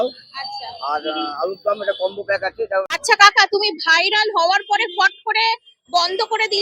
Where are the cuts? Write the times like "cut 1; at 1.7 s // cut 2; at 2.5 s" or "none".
cut 1; at 2.9 s